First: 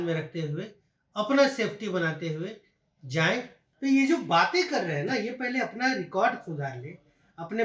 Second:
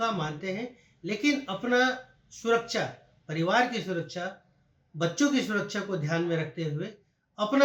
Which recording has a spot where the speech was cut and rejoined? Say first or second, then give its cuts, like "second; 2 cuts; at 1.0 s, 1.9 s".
first; 1 cut; at 3.6 s